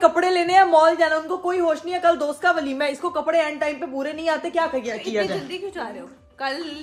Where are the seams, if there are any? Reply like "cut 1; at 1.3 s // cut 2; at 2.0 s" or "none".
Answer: none